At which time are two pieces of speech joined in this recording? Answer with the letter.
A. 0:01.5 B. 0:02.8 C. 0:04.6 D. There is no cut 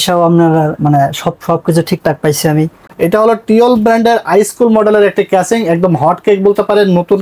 B